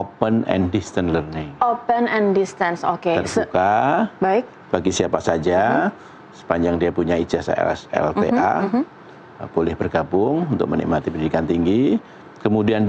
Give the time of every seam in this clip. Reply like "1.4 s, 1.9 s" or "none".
none